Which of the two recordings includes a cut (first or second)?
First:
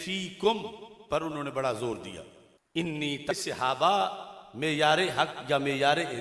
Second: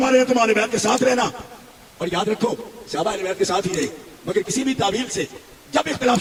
first